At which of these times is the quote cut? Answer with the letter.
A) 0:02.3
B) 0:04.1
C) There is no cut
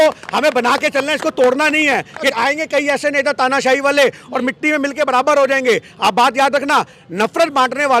A